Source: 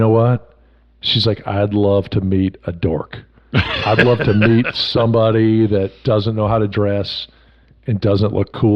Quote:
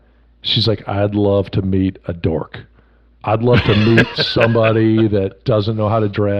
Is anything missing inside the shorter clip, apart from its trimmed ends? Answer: no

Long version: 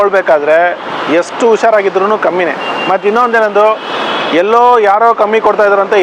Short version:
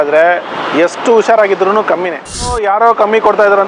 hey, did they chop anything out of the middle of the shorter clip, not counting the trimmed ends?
yes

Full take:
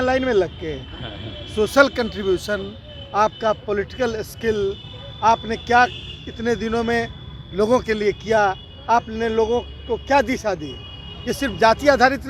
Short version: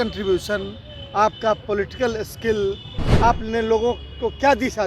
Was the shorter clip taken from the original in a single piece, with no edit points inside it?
no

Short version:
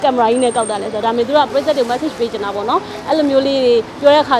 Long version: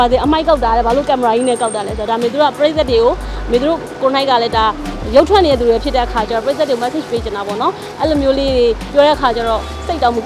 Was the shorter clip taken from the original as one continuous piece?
no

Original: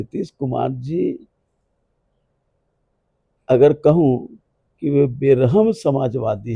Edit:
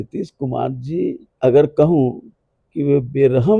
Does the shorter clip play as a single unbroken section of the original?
no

